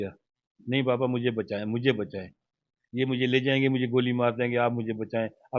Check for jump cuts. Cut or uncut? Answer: uncut